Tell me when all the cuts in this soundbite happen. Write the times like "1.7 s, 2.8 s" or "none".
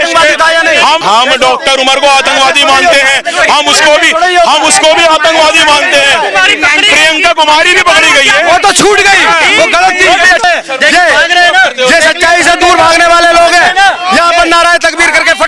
1.0 s, 10.4 s